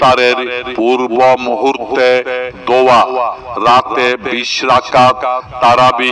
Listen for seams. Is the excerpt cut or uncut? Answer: uncut